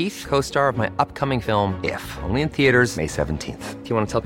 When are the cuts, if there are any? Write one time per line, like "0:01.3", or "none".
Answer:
none